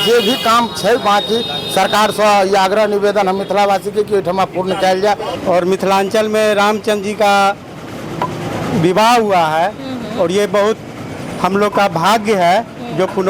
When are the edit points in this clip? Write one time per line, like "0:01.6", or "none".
0:05.3

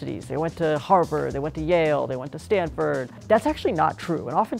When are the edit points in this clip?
none

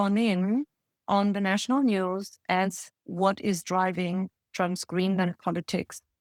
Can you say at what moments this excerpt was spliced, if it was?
none

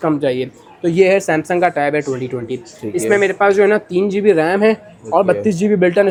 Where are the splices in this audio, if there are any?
none

